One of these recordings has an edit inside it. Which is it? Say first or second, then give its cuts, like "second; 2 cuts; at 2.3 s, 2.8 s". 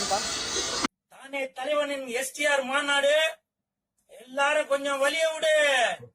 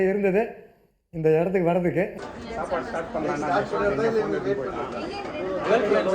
second; 1 cut; at 2.3 s